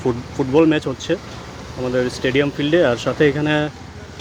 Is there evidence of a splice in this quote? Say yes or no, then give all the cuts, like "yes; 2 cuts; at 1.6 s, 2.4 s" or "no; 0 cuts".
no; 0 cuts